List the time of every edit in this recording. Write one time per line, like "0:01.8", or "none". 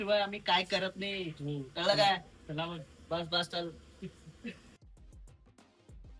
0:04.7